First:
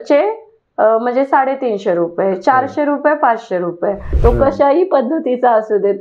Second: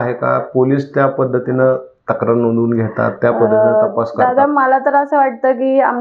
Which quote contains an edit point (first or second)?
first